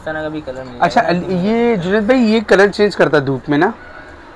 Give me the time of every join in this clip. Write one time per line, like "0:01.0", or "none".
none

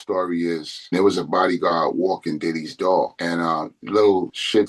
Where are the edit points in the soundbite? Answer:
0:00.9

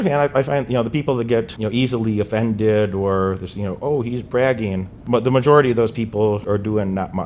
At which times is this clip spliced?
0:01.5
0:05.0
0:06.4

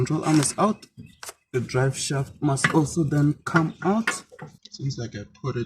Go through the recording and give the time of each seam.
0:04.6

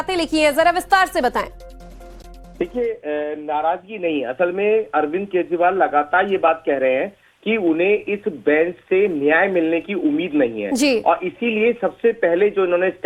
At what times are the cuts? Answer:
none

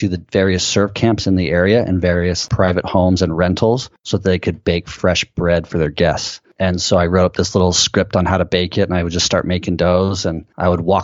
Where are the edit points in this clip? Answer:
0:02.4

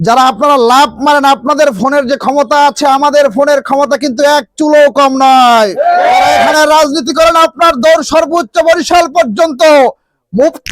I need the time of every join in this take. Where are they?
0:06.5

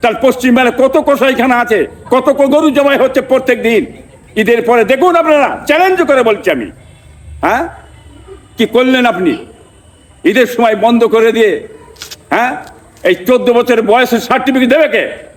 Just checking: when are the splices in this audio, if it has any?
none

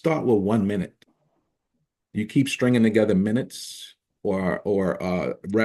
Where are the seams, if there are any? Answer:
none

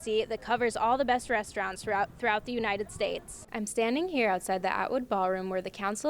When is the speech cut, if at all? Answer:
0:03.4

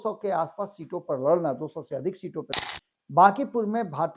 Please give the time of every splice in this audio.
0:02.5

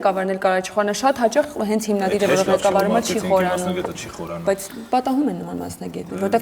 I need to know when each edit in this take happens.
none

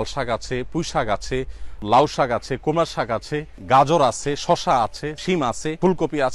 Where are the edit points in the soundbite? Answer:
0:01.8
0:05.2

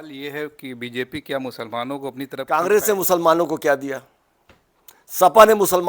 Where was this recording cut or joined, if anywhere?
0:02.3

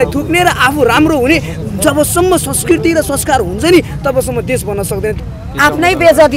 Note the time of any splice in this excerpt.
0:05.2

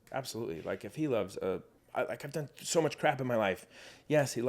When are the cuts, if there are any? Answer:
0:01.8

